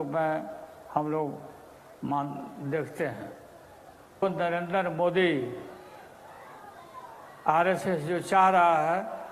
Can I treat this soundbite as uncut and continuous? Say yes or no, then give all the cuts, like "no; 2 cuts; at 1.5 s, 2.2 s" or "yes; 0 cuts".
no; 1 cut; at 4.2 s